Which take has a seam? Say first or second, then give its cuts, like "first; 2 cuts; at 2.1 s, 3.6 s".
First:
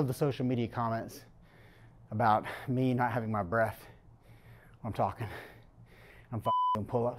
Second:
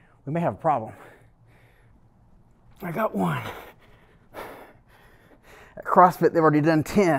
second; 2 cuts; at 2.0 s, 5.4 s